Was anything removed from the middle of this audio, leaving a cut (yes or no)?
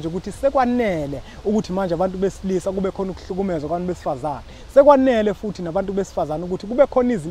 no